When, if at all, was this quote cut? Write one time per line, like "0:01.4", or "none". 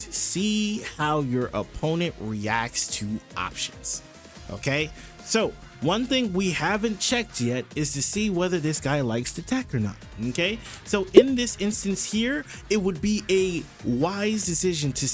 none